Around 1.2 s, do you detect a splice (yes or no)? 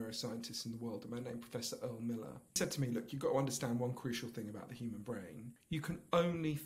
no